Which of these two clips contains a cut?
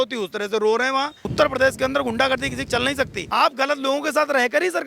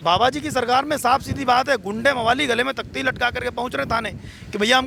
first; 2 cuts; at 1.3 s, 3.2 s

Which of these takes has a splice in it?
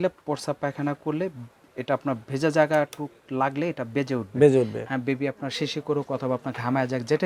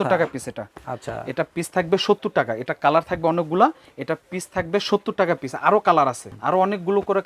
second; 1 cut; at 6.3 s

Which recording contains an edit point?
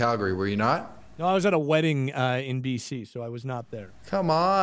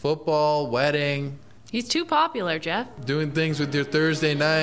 second; 1 cut; at 2.9 s

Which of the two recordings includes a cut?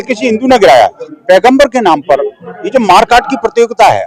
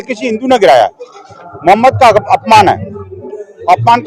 first; 1 cut; at 1.1 s

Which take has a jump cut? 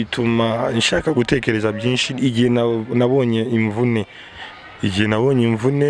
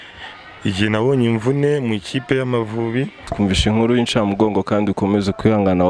second; 1 cut; at 3.3 s

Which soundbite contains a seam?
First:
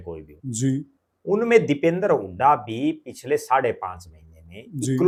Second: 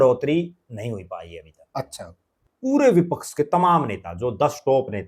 second; 1 cut; at 2.4 s

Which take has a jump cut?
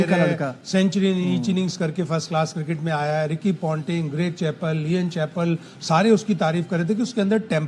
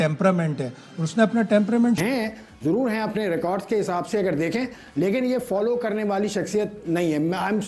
second; 1 cut; at 2.0 s

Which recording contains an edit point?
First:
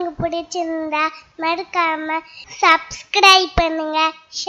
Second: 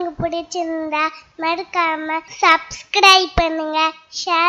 second; 1 cut; at 2.3 s

